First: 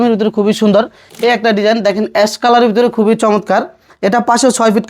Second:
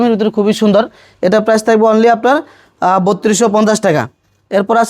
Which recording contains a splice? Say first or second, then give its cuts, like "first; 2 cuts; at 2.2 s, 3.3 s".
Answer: first; 1 cut; at 1.1 s